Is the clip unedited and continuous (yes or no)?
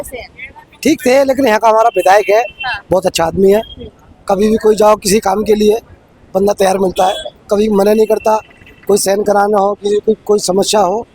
yes